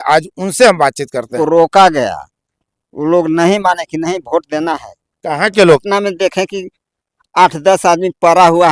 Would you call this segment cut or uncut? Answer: cut